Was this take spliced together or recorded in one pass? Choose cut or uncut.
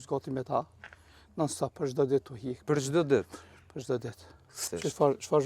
cut